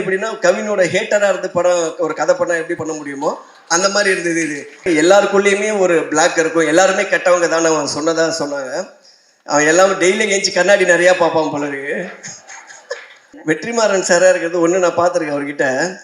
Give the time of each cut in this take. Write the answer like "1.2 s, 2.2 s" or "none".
4.9 s, 13.4 s